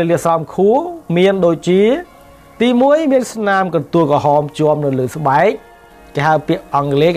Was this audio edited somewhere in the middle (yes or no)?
no